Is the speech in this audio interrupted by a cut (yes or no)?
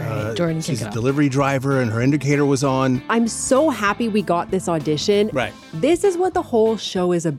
yes